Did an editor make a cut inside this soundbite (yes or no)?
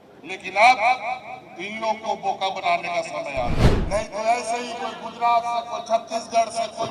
yes